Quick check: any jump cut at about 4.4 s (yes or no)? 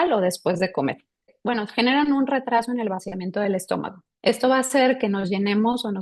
no